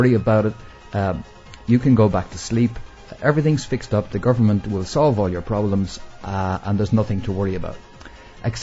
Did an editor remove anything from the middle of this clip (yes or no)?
yes